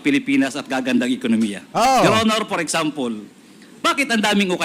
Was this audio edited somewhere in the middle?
no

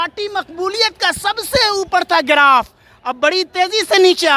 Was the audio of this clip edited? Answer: no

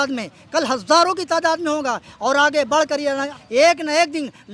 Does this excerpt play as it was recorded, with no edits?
no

